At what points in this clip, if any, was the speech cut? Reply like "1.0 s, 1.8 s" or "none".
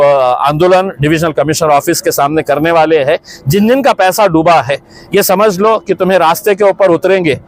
none